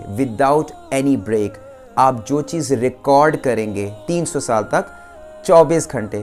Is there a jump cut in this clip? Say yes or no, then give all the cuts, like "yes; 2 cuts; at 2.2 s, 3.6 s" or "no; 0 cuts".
no; 0 cuts